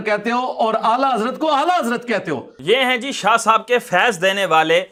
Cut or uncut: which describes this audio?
uncut